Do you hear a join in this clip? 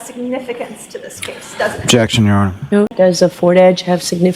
yes; 1 cut; at 2.9 s

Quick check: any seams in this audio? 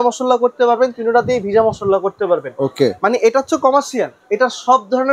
no; 0 cuts

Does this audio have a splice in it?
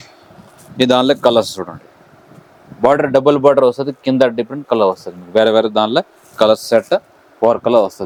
no; 0 cuts

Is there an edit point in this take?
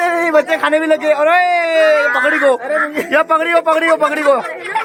no; 0 cuts

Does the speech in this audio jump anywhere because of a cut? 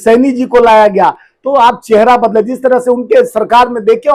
no; 0 cuts

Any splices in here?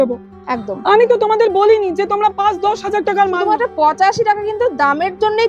yes; 1 cut; at 3.5 s

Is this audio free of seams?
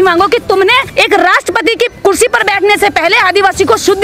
no; 2 cuts; at 0.9 s, 1.9 s

